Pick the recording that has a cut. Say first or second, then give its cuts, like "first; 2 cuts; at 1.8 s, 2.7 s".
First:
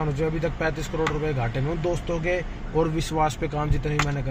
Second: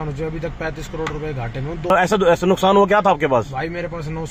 second; 1 cut; at 1.9 s